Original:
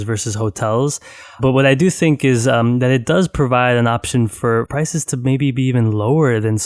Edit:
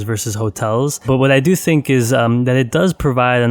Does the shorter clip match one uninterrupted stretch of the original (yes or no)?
no